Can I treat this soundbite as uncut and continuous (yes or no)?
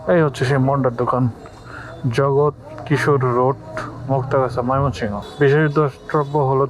no